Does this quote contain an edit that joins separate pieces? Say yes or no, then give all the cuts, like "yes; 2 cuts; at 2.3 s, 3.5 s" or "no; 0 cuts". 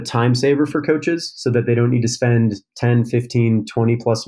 no; 0 cuts